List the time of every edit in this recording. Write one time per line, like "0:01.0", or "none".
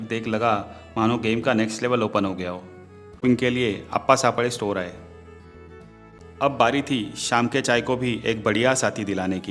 0:03.2
0:06.2

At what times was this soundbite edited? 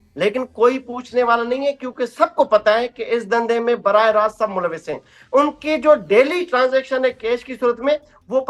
0:05.1

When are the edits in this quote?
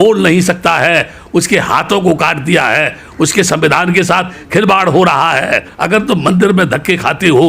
0:05.7

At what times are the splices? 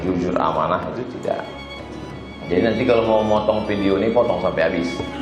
0:01.9

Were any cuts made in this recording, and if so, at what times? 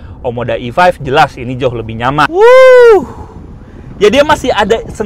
0:02.3

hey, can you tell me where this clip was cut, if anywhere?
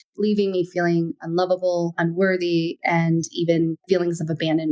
0:01.9
0:03.8

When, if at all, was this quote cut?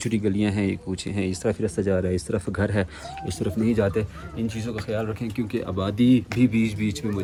none

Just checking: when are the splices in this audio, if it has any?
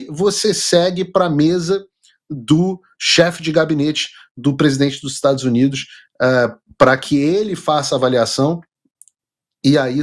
none

